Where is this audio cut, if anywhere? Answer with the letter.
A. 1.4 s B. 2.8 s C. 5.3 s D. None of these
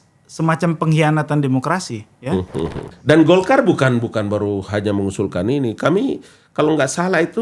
B